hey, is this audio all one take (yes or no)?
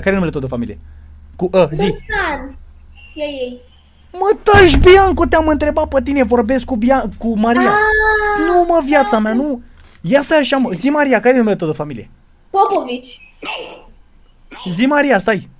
yes